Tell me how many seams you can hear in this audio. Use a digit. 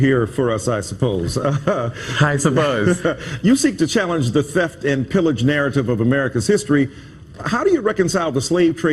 1